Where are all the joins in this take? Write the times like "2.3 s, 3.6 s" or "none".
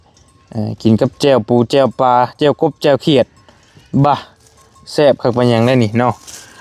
none